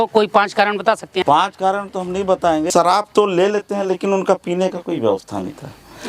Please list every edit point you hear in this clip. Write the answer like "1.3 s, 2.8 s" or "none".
1.2 s, 2.7 s